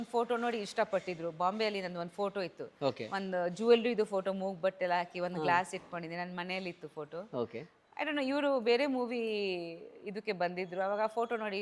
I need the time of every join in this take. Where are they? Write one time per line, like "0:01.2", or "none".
none